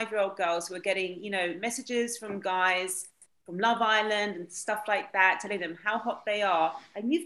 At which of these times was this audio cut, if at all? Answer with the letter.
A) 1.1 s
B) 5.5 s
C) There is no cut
C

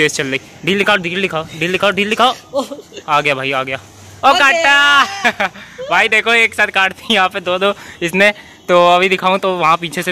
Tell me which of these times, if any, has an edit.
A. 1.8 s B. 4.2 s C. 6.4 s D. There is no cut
D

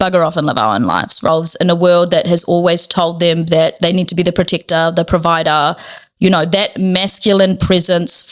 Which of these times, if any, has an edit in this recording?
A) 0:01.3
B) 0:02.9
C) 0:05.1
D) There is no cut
A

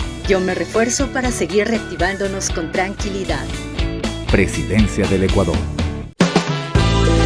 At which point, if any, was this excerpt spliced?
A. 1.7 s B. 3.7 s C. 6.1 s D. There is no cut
C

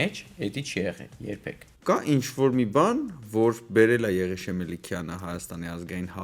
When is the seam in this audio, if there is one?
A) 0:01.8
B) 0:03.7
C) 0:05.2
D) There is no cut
A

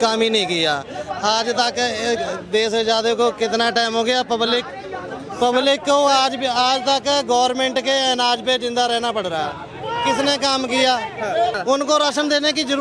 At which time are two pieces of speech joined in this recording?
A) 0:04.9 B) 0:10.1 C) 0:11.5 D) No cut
C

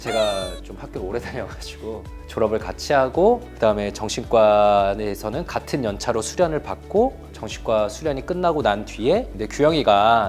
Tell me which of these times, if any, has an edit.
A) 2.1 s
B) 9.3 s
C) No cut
B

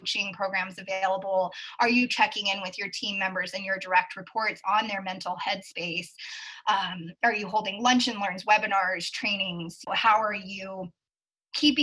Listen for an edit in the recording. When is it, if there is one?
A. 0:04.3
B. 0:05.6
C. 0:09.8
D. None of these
C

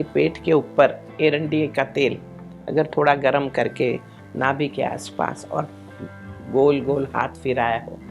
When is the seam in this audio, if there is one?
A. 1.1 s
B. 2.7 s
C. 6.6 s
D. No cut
A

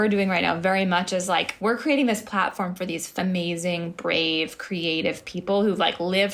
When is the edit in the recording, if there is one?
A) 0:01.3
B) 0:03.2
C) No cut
B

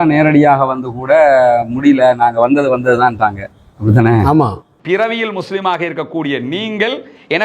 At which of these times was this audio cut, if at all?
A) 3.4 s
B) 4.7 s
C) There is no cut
B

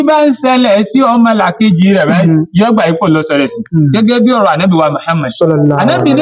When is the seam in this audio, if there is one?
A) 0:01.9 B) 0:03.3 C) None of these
C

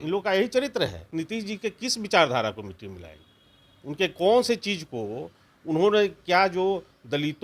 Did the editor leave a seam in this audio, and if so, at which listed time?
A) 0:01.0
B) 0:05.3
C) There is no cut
A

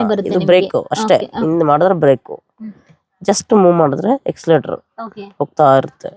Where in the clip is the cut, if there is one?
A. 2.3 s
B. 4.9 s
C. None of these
C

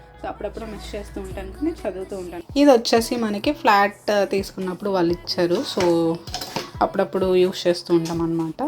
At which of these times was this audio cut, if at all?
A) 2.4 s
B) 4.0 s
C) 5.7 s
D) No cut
A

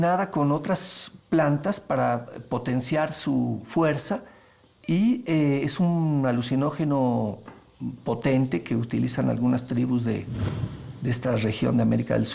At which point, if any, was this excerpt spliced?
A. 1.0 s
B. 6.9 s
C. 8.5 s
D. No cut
A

